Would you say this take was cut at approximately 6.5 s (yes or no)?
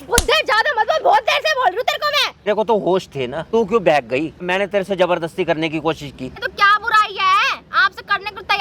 yes